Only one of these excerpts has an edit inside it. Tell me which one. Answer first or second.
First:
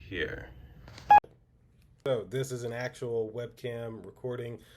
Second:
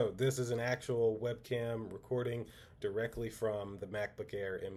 first